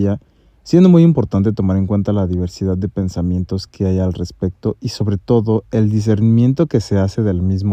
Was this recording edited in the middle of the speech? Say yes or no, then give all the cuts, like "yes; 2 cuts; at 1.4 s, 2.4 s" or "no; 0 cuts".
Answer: no; 0 cuts